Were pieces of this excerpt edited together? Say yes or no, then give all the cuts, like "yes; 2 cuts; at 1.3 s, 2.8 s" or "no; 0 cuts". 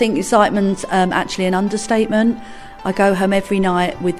no; 0 cuts